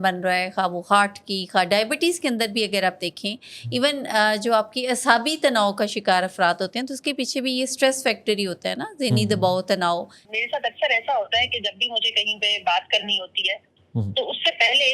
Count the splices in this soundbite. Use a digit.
1